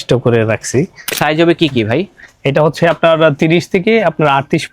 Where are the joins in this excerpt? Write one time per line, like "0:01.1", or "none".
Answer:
0:01.2